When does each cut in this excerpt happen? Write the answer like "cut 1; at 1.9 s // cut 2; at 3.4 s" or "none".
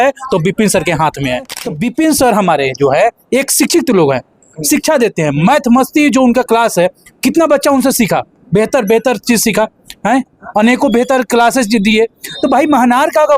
cut 1; at 1.6 s